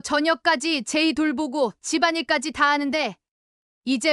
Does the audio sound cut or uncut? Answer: uncut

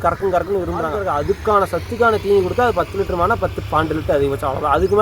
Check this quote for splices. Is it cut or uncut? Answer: cut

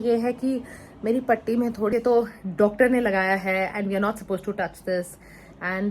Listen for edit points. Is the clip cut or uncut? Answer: cut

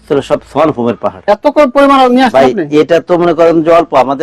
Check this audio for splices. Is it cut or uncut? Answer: cut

